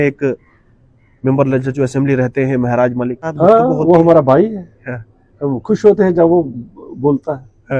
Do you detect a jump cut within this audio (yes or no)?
yes